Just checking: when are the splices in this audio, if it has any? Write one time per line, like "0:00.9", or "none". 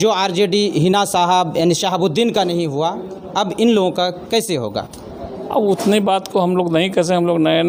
none